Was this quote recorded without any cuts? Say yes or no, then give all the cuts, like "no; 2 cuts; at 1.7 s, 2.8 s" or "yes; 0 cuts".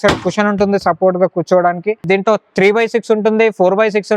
no; 1 cut; at 2.0 s